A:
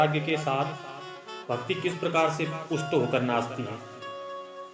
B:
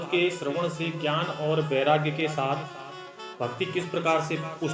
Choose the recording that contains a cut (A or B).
A